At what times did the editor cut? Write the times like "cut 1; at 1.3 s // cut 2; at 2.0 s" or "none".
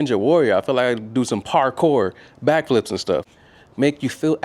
cut 1; at 3.4 s